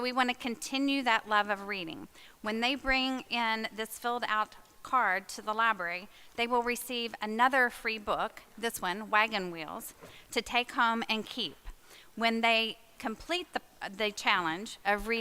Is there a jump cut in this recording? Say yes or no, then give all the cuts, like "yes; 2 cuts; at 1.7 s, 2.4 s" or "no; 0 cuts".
no; 0 cuts